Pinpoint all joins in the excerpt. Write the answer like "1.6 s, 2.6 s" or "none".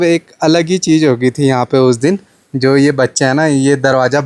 none